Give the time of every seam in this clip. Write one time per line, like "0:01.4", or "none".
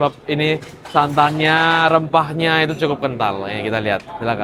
none